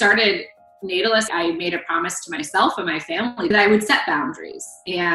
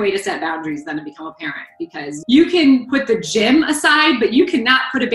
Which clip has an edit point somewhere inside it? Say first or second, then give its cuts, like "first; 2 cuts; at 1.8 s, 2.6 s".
first; 1 cut; at 1.3 s